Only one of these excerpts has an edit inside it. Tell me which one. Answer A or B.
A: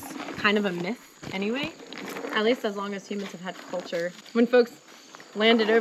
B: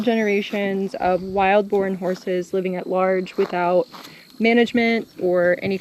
A